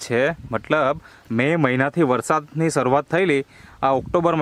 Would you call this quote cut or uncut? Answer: uncut